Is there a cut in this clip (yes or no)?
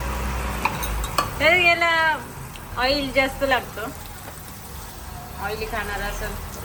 no